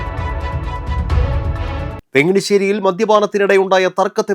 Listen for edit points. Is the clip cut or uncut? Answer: cut